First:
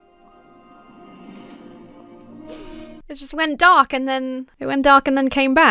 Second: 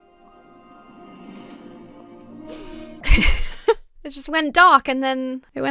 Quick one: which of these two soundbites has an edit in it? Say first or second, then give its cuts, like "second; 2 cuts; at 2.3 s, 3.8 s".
first; 1 cut; at 3.0 s